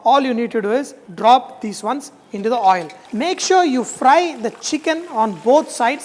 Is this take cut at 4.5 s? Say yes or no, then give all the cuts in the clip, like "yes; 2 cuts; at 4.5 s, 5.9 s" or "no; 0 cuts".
no; 2 cuts; at 1.0 s, 3.0 s